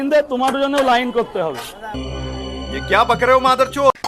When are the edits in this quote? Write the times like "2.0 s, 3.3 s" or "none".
1.7 s

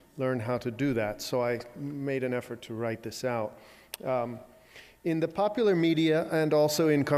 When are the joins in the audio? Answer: none

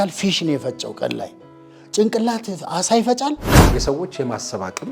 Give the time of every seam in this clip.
3.5 s

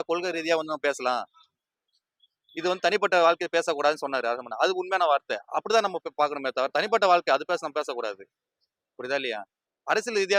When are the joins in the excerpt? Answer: none

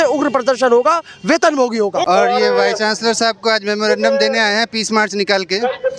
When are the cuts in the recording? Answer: 2.0 s

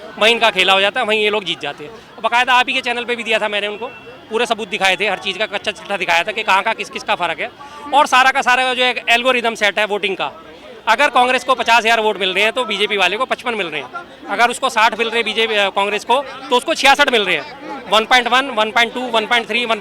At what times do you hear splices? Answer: none

